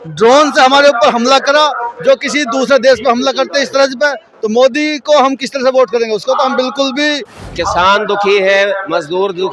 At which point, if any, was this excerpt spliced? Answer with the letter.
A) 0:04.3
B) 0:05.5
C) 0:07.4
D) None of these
C